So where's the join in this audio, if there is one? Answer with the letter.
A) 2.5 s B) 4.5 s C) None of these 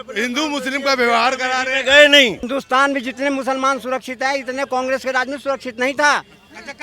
A